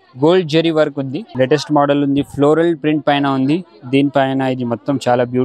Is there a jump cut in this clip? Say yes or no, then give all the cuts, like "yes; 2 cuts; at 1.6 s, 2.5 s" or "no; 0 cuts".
yes; 1 cut; at 1.2 s